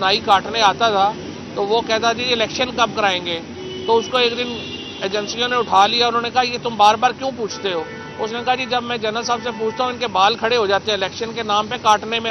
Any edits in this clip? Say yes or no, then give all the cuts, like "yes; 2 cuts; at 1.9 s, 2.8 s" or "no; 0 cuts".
no; 0 cuts